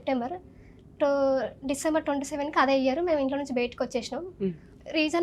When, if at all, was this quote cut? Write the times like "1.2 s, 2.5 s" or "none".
none